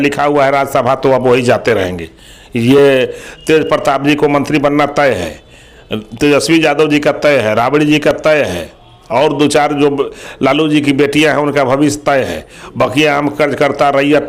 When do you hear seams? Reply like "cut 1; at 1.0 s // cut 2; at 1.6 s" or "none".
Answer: none